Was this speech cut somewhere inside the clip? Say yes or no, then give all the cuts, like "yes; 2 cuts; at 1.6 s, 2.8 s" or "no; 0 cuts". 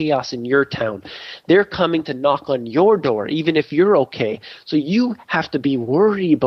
no; 0 cuts